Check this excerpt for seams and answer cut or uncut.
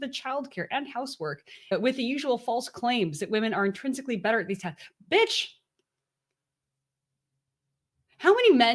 uncut